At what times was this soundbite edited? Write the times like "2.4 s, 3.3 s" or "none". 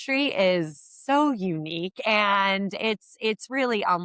none